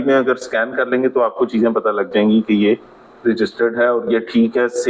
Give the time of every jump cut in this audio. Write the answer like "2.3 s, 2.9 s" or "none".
none